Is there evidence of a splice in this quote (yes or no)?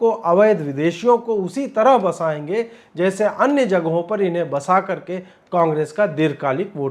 no